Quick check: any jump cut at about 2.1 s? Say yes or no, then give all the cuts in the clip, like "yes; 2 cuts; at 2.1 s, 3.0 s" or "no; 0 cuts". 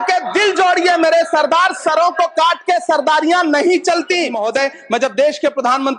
no; 1 cut; at 4.4 s